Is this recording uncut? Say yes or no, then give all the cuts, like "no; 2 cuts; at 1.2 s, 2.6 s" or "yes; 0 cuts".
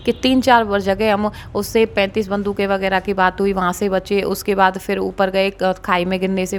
yes; 0 cuts